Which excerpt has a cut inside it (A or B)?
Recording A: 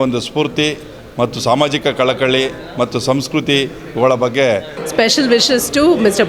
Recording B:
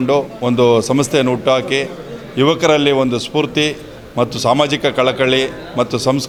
A